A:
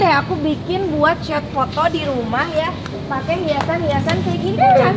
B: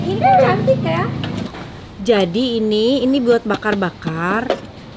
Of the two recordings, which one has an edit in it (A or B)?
B